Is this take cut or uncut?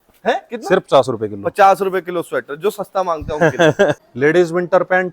cut